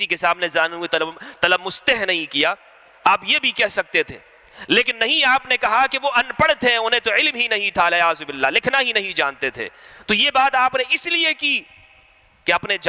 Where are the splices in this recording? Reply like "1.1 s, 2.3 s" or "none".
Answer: none